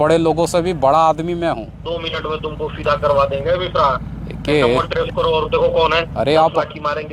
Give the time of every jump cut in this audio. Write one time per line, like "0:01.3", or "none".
0:01.9
0:06.1